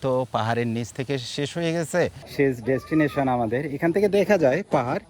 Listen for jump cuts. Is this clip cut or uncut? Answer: cut